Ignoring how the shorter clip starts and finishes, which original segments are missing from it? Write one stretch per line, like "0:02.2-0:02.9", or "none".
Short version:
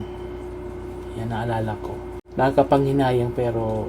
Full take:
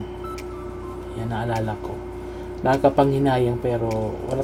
0:02.2-0:02.5